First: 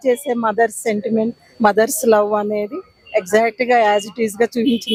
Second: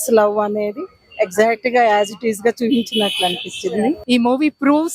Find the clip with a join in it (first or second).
second